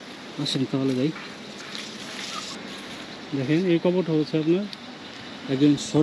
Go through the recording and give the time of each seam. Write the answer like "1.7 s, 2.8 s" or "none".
2.5 s